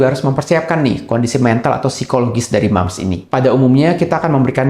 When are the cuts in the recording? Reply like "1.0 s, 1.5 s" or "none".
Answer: 3.3 s